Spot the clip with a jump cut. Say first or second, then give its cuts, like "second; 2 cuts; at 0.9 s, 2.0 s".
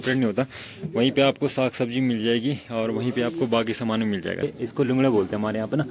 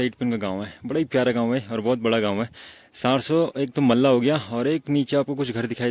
first; 1 cut; at 4.5 s